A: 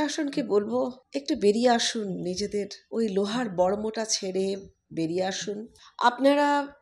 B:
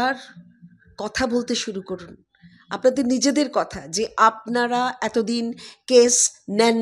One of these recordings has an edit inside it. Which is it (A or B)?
A